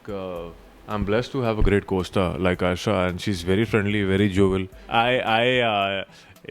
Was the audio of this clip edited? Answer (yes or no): yes